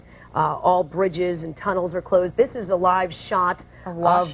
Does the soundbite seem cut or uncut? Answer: uncut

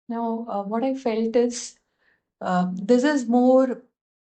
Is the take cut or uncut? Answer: uncut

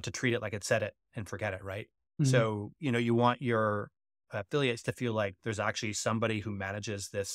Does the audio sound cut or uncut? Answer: uncut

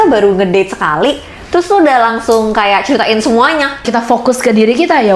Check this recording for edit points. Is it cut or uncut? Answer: cut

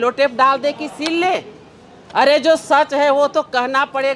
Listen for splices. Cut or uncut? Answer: uncut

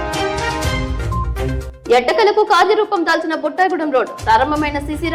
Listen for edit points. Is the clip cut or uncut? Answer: uncut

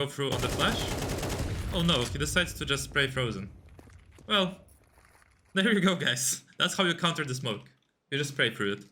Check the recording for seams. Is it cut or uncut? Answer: uncut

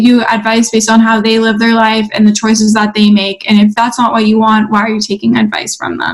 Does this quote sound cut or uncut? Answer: uncut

